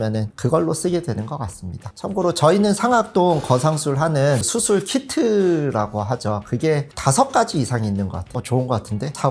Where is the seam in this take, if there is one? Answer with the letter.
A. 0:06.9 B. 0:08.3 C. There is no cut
B